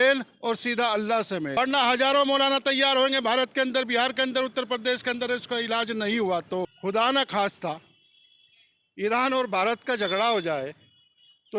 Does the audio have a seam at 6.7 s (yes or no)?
yes